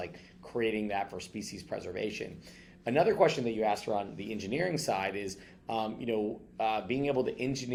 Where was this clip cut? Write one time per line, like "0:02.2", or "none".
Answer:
none